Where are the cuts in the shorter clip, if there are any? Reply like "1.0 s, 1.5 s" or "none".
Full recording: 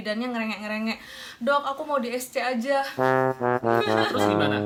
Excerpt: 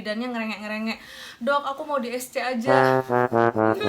2.6 s

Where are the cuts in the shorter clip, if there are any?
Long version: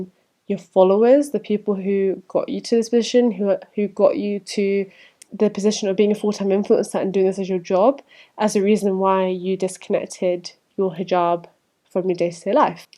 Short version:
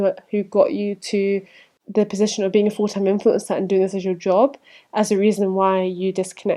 none

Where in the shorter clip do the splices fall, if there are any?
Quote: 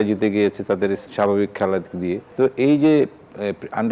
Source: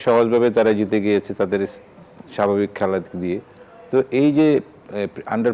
1.1 s, 2.2 s

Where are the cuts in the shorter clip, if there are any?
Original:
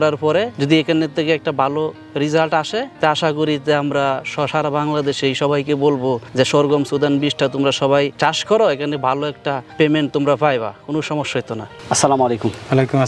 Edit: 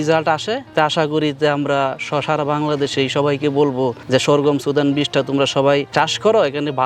none

